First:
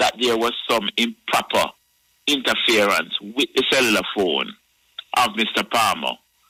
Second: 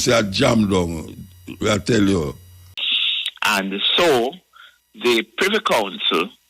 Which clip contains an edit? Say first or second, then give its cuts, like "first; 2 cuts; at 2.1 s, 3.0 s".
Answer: second; 1 cut; at 2.6 s